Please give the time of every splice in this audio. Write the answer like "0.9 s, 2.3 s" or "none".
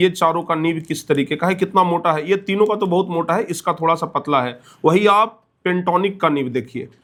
none